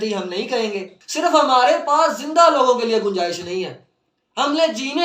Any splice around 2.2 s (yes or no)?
no